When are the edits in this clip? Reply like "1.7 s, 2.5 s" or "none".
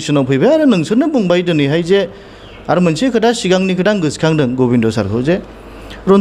none